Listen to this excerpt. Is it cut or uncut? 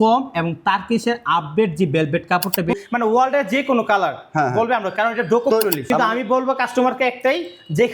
cut